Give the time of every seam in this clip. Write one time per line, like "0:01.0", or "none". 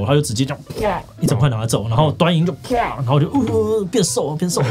none